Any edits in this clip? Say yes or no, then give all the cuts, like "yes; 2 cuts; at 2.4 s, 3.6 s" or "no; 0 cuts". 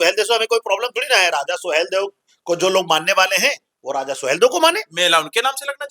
no; 0 cuts